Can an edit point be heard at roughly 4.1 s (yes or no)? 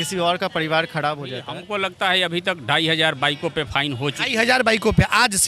no